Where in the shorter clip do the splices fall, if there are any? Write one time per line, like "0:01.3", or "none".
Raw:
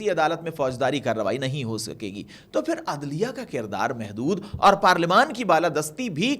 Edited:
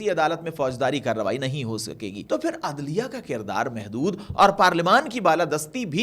0:02.2